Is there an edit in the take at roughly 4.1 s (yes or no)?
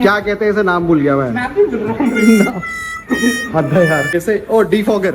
yes